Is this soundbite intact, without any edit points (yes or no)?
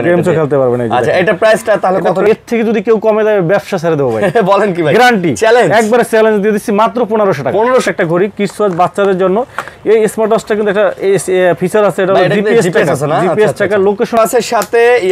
no